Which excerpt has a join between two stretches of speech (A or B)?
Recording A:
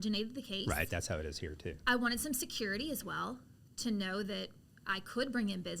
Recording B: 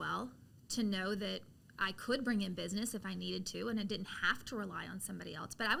A